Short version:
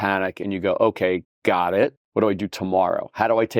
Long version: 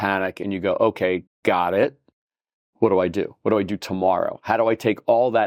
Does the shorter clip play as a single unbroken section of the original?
no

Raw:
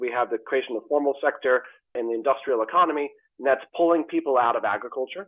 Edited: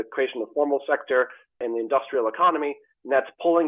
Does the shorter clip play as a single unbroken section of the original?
yes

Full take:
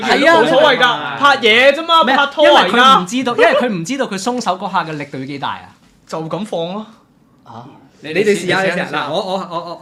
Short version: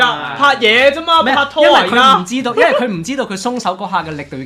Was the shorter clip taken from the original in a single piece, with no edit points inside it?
yes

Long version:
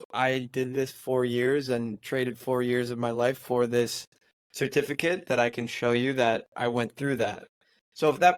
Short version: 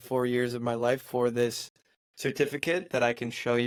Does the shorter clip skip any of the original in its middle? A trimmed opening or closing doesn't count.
no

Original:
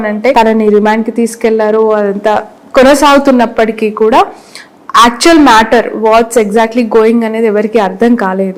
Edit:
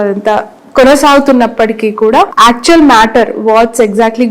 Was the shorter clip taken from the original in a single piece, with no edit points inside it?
no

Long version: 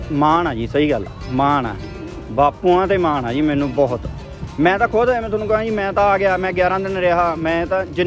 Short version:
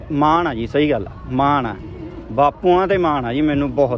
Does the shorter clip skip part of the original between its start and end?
no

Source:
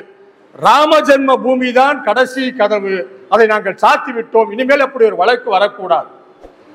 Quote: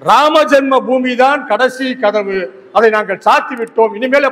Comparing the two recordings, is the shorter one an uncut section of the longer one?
yes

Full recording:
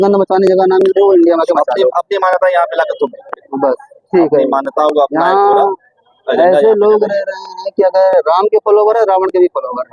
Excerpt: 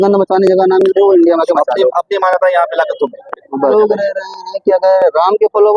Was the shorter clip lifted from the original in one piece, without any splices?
no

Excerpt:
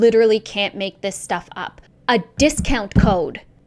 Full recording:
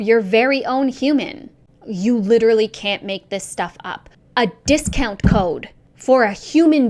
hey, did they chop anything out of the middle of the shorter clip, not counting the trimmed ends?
no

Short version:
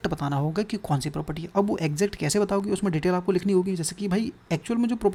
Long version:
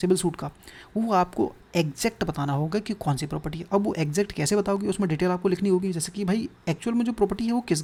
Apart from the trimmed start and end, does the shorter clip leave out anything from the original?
no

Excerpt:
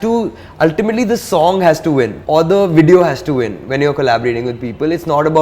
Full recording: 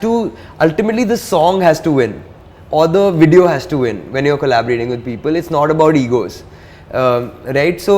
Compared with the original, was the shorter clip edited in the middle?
yes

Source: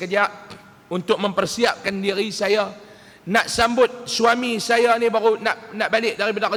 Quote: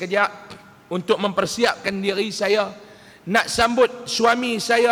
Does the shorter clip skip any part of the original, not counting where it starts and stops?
no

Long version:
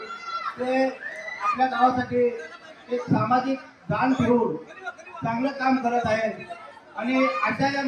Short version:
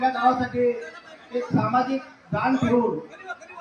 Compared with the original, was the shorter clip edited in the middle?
no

